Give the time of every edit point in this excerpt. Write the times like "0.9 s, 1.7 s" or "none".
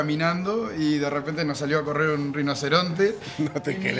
none